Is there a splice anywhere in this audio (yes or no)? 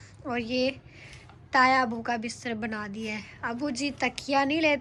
no